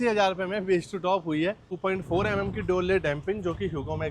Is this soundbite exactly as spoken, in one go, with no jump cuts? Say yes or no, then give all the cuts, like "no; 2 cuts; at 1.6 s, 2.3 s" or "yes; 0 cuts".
no; 1 cut; at 1.7 s